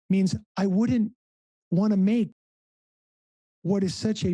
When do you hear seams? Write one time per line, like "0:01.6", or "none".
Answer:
none